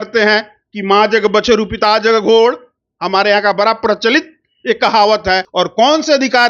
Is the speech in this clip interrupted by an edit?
yes; 1 cut; at 5.5 s

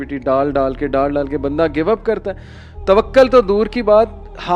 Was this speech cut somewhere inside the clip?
no; 0 cuts

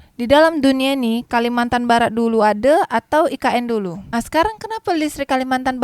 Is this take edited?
no; 0 cuts

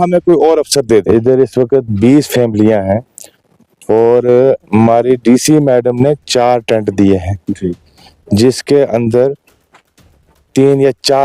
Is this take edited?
yes; 1 cut; at 1.1 s

